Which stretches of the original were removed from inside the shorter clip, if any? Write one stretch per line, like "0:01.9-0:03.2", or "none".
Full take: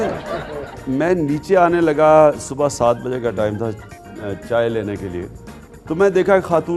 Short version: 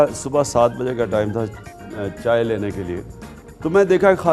none